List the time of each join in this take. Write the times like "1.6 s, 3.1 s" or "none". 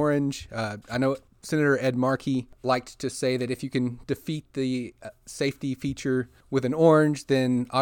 1.3 s, 2.5 s, 6.4 s